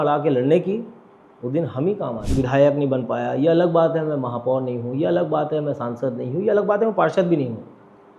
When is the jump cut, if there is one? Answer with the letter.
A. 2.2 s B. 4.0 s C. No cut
A